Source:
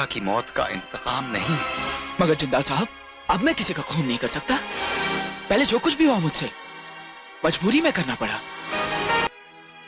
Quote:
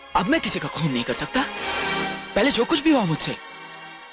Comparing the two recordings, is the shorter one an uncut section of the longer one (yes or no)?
yes